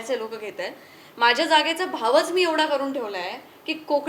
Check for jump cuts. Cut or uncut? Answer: uncut